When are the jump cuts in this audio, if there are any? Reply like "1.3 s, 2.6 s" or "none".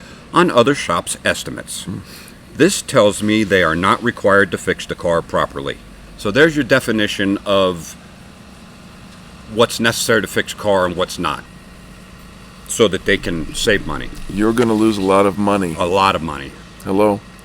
11.4 s